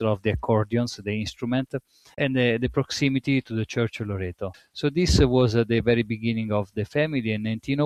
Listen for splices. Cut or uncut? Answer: uncut